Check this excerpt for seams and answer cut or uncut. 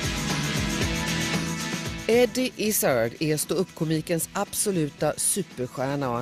cut